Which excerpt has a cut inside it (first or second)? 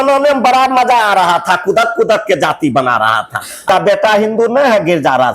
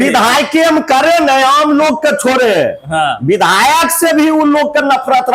first